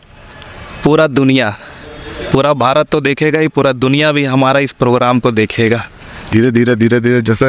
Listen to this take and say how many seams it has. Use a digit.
1